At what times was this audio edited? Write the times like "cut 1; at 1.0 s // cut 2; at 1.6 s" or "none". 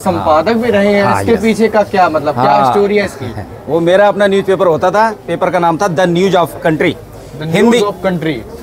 none